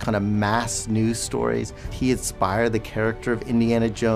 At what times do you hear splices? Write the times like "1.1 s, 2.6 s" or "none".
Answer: 1.9 s